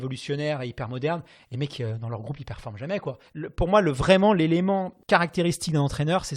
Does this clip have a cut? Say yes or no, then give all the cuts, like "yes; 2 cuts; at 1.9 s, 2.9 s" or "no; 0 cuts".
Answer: yes; 1 cut; at 4.9 s